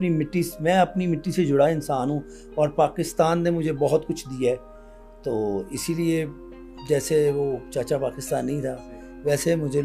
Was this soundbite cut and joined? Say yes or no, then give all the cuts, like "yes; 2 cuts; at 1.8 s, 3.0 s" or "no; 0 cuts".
no; 0 cuts